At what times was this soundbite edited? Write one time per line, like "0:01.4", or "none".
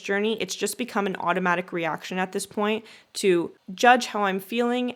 none